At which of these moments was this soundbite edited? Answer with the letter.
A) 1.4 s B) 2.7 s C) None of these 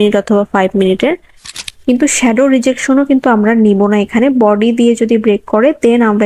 A